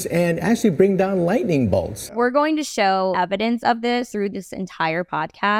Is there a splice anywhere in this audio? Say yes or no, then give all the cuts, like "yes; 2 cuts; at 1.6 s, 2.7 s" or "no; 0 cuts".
yes; 3 cuts; at 2.0 s, 3.1 s, 4.1 s